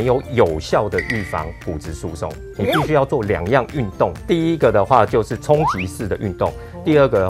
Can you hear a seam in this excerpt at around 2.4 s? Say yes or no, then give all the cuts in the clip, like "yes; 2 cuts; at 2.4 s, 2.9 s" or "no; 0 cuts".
no; 1 cut; at 4.2 s